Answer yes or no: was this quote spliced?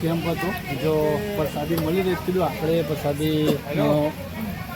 no